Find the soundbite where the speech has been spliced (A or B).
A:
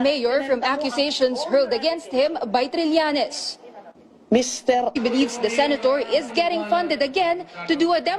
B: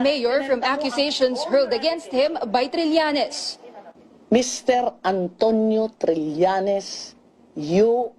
B